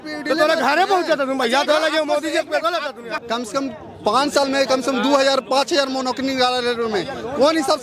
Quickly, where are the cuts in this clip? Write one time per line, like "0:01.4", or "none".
0:03.1